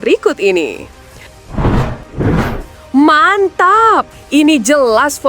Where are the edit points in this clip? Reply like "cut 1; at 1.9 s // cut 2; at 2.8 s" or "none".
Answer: cut 1; at 1.3 s